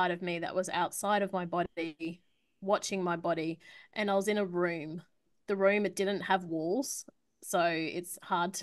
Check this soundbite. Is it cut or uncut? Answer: cut